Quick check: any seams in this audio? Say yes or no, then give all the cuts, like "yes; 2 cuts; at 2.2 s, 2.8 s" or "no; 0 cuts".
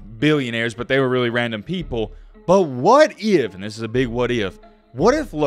no; 0 cuts